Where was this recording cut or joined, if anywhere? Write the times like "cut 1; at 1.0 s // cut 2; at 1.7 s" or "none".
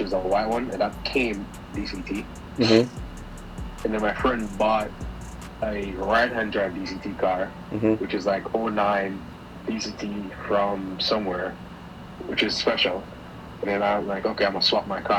none